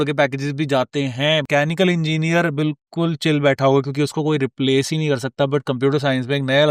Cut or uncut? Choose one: cut